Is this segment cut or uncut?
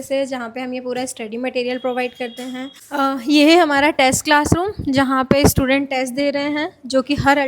cut